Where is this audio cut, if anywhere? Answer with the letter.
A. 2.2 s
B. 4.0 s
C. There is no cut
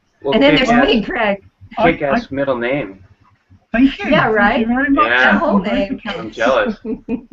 B